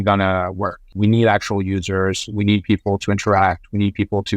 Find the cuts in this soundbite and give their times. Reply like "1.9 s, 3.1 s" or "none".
0.9 s